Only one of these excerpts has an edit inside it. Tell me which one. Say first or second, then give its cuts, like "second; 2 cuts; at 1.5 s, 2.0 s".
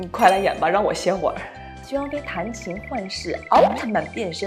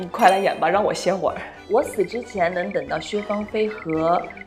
second; 1 cut; at 1.5 s